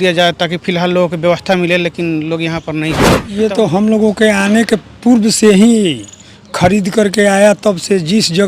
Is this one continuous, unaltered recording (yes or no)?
no